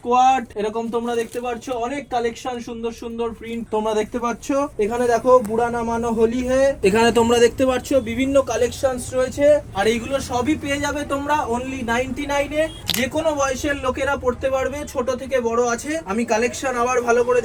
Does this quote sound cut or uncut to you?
uncut